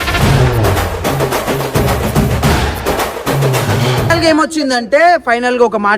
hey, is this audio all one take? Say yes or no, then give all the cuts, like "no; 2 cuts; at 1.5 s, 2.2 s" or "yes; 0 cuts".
no; 1 cut; at 4.1 s